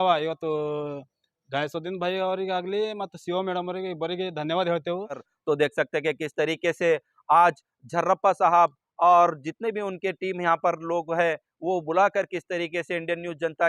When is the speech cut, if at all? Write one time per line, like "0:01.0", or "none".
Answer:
0:05.3